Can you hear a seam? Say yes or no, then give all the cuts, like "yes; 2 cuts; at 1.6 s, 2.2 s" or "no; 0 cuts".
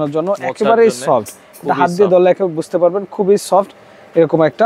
no; 0 cuts